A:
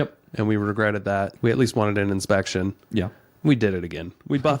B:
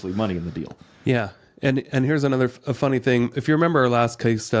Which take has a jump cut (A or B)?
A